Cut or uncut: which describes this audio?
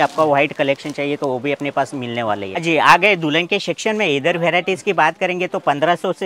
cut